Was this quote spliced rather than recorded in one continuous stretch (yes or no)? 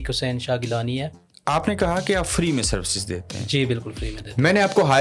yes